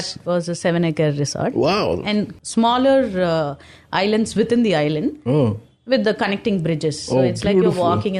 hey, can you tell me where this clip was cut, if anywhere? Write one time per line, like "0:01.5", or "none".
0:02.4